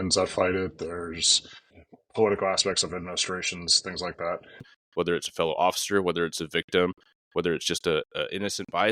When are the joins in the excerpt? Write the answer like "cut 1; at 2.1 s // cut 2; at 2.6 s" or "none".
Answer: cut 1; at 4.8 s